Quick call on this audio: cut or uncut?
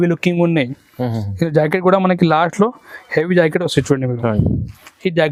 uncut